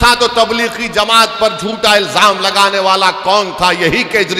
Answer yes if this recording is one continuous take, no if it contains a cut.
yes